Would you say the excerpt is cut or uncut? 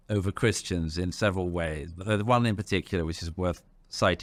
uncut